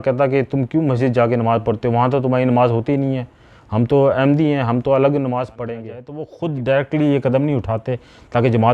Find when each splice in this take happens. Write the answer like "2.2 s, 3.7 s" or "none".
6.3 s